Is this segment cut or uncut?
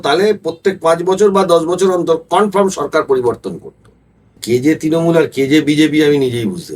cut